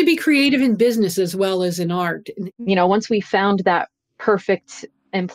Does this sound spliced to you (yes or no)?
yes